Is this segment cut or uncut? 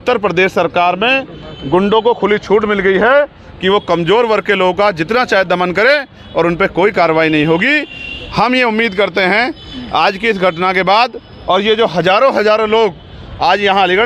uncut